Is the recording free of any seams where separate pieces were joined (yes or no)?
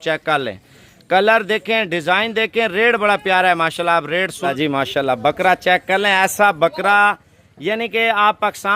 no